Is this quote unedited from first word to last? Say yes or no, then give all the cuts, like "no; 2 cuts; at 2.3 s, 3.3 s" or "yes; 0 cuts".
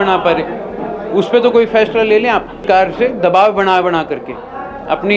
no; 1 cut; at 2.6 s